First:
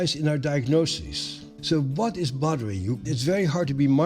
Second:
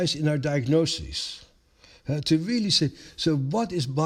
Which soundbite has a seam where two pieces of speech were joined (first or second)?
first